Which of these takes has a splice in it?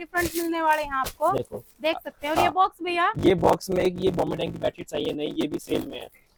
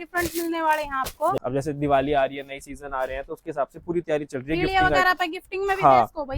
second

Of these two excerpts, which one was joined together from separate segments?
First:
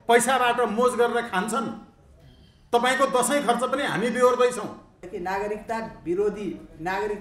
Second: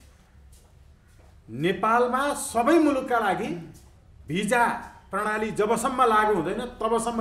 first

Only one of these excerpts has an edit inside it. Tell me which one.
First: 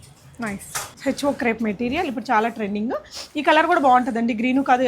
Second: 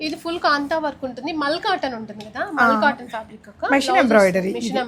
first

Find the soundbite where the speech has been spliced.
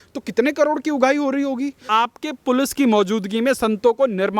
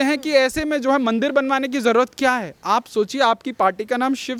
first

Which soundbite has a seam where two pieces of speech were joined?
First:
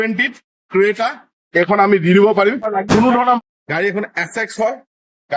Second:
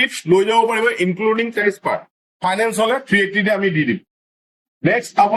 first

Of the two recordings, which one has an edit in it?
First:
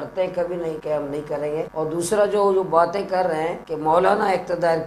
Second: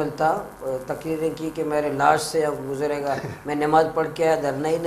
first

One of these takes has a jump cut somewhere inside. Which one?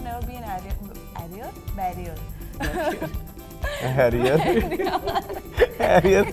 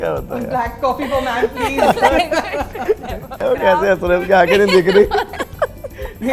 second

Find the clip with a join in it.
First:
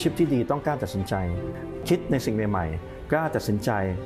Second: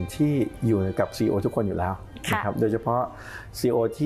first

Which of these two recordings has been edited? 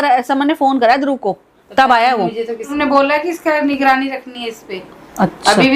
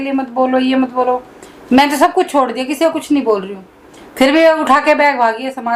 first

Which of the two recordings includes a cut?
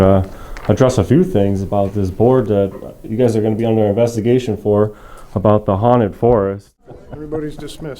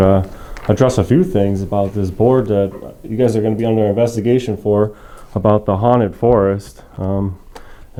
first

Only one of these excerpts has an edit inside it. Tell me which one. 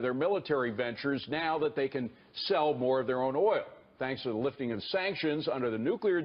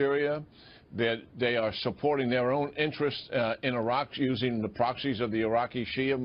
first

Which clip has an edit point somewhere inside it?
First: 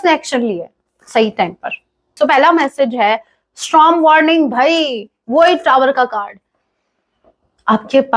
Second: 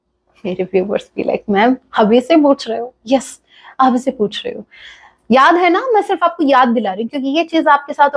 first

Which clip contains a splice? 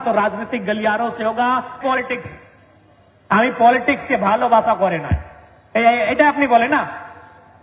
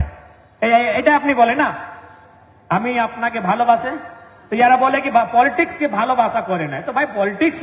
first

